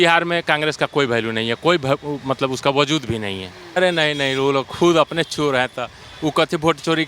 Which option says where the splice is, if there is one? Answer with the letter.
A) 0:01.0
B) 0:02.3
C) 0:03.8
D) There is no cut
C